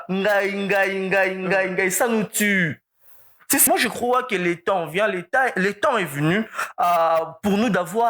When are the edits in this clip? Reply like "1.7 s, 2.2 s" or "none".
3.6 s